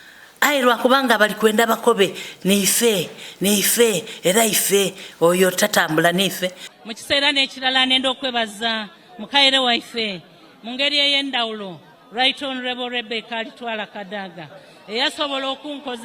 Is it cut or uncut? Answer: cut